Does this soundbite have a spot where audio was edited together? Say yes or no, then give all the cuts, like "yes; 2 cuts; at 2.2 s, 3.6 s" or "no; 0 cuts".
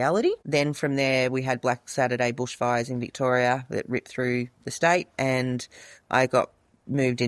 no; 0 cuts